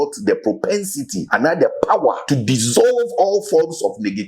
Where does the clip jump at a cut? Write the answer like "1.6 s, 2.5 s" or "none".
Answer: 1.2 s, 2.2 s